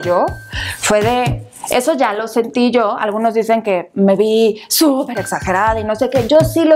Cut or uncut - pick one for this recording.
uncut